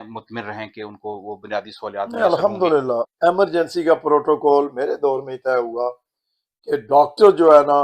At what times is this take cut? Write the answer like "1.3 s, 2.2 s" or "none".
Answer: 3.1 s